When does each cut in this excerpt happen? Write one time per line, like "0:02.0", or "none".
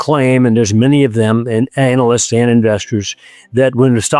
none